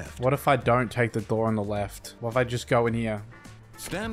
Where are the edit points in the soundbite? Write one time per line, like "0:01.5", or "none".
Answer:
none